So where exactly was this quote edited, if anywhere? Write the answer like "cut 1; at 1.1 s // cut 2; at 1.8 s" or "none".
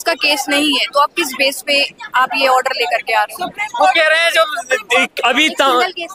none